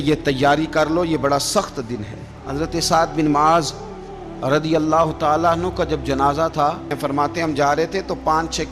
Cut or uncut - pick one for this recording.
cut